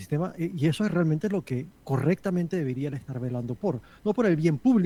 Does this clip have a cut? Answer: no; 0 cuts

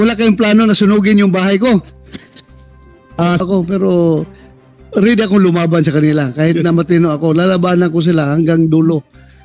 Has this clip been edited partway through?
yes; 1 cut; at 3.4 s

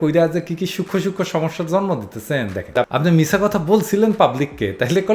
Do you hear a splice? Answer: yes; 1 cut; at 2.7 s

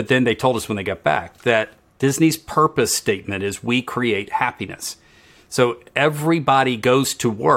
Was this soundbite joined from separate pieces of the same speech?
yes; 1 cut; at 1.8 s

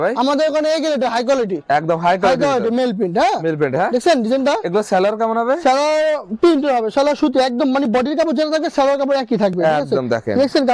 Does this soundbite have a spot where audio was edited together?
no; 0 cuts

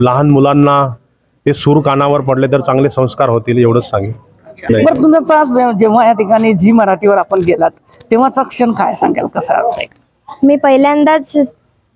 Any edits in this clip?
yes; 1 cut; at 4.7 s

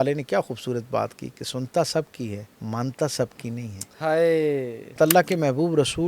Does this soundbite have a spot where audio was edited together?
yes; 2 cuts; at 2.5 s, 5.0 s

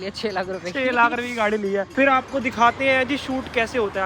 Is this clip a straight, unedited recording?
no; 1 cut; at 1.9 s

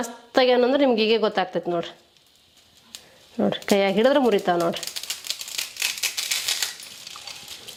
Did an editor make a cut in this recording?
no; 0 cuts

